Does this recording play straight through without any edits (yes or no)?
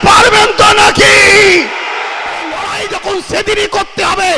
no